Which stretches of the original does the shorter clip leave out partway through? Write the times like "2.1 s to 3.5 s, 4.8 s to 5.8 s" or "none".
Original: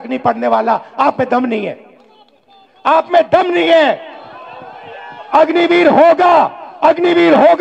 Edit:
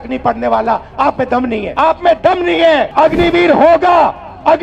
1.7 s to 2.8 s, 4.0 s to 5.3 s